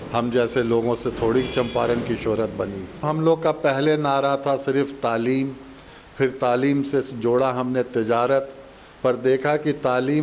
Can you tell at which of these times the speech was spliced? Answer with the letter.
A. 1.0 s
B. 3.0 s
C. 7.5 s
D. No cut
B